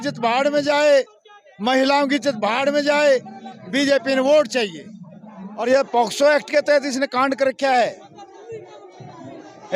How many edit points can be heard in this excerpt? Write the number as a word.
one